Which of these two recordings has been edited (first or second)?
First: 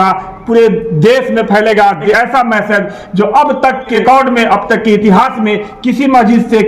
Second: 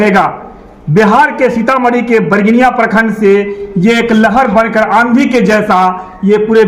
first